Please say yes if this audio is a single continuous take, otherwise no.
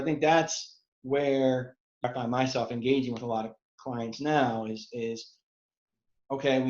no